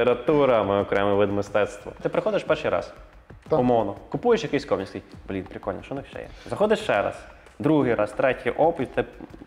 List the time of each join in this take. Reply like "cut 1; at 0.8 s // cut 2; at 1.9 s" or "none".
cut 1; at 2.0 s